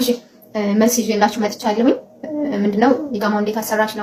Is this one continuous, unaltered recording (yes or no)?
yes